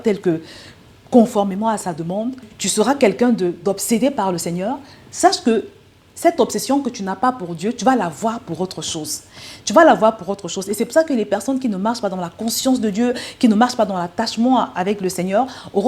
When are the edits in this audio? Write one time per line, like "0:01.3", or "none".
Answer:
0:02.6